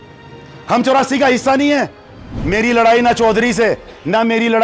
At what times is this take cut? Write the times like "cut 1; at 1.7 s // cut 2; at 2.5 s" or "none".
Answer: cut 1; at 2.3 s